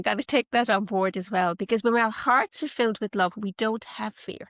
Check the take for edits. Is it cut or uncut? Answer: uncut